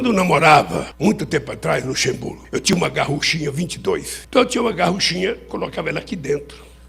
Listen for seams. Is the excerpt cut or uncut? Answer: cut